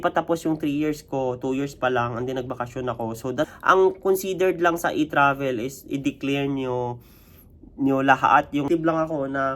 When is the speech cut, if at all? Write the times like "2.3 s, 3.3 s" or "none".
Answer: 3.5 s, 8.7 s